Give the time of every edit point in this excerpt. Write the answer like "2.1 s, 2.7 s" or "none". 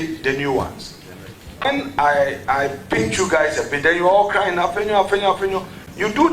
1.7 s